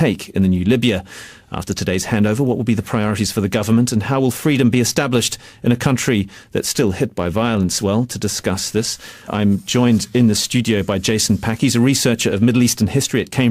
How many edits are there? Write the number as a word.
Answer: one